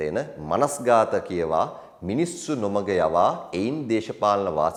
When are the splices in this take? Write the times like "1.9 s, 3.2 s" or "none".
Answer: none